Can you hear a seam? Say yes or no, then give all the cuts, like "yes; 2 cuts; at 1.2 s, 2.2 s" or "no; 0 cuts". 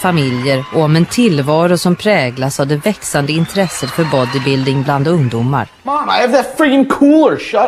no; 0 cuts